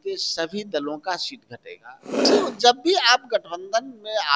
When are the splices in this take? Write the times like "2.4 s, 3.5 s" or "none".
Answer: 2.3 s